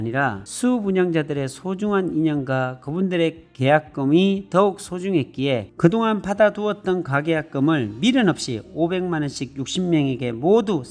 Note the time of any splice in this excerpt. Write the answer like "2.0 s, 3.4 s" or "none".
none